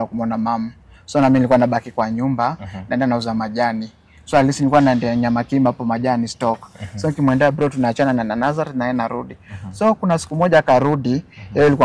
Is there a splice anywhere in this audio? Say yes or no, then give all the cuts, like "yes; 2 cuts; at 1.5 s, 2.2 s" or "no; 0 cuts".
no; 0 cuts